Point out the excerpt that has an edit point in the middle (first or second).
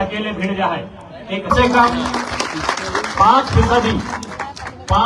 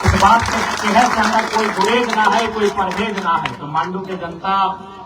first